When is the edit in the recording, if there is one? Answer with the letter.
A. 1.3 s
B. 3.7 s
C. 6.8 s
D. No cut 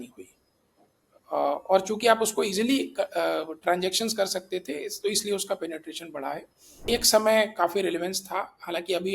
C